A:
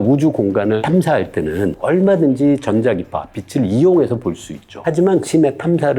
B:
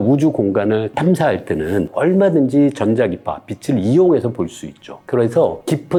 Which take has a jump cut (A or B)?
A